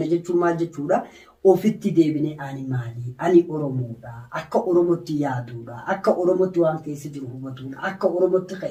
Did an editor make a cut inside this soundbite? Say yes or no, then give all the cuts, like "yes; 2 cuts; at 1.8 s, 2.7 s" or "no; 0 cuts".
no; 0 cuts